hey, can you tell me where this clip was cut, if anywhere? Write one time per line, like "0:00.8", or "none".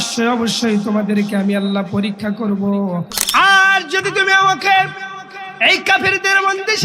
0:03.2